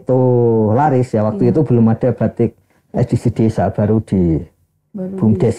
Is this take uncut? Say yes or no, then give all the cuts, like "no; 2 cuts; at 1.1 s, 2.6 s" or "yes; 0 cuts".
yes; 0 cuts